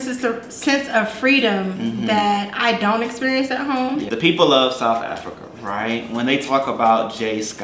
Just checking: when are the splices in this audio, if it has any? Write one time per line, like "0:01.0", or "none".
0:04.1